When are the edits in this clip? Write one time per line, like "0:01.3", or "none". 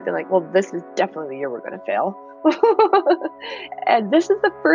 none